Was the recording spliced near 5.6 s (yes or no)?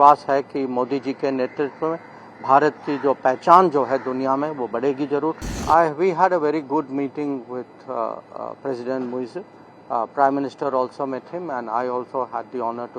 yes